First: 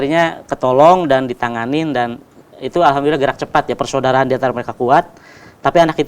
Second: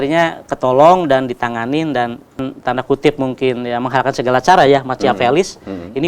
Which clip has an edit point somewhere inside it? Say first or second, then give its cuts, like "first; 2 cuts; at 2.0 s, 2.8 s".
second; 1 cut; at 2.5 s